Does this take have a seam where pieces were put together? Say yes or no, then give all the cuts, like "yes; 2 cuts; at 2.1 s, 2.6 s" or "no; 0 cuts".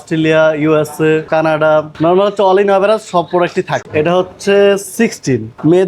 yes; 1 cut; at 3.8 s